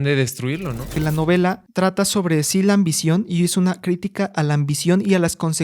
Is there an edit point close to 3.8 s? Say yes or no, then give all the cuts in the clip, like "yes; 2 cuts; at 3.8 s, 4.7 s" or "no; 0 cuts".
no; 2 cuts; at 0.9 s, 1.6 s